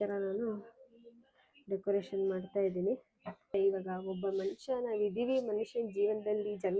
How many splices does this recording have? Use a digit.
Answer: 1